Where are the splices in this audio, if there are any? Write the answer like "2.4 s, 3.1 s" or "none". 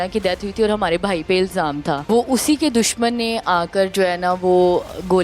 2.1 s